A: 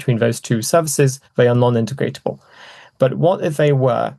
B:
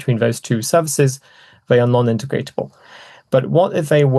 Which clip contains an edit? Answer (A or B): A